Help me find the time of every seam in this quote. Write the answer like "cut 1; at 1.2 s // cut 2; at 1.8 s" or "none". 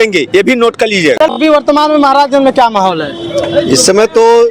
cut 1; at 1.2 s